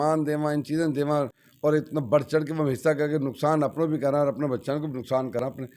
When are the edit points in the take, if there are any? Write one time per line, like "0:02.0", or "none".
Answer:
none

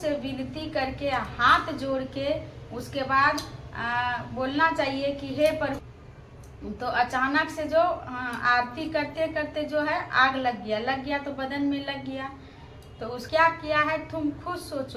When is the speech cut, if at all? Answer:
0:05.8
0:13.2

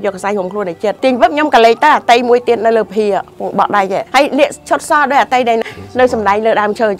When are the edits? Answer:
0:01.0
0:04.1
0:05.6

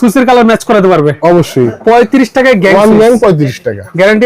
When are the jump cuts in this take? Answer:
0:01.7

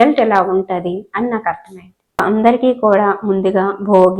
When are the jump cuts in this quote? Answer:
0:02.2

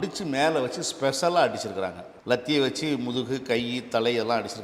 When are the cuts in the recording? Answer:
0:02.1

